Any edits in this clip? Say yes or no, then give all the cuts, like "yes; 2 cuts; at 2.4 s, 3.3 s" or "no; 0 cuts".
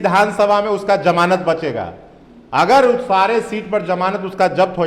no; 0 cuts